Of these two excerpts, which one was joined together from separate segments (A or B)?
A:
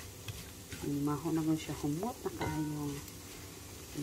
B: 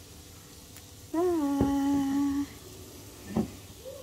B